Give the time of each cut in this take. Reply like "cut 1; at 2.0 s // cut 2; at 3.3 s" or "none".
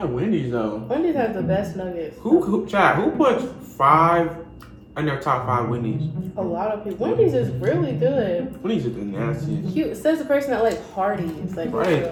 none